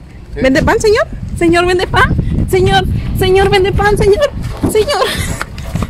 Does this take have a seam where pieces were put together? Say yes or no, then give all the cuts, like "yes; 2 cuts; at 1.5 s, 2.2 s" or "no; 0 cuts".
no; 0 cuts